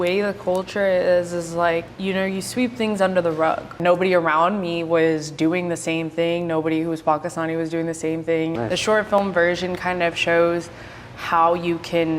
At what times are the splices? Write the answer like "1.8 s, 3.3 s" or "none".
1.9 s, 3.8 s, 8.5 s